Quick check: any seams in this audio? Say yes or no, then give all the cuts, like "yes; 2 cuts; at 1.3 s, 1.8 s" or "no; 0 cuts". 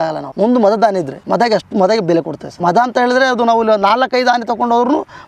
no; 0 cuts